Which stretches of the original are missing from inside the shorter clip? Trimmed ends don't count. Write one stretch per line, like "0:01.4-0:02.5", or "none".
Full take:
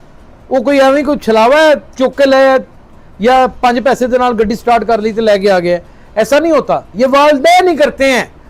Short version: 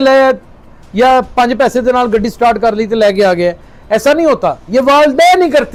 none